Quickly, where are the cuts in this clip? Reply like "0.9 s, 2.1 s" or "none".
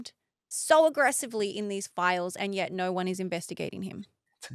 2.7 s